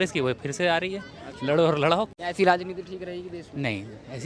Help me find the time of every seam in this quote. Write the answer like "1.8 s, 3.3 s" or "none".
2.1 s